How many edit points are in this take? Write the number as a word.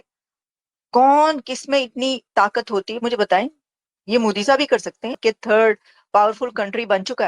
one